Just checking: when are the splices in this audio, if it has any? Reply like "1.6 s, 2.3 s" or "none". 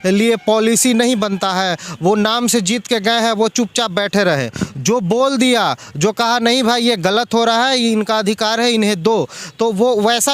none